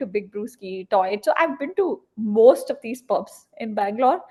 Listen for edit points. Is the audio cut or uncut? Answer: uncut